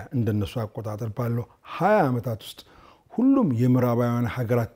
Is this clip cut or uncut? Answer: uncut